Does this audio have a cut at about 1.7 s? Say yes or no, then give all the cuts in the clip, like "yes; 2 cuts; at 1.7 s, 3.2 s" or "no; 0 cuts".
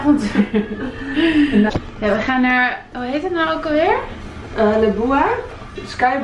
yes; 1 cut; at 1.7 s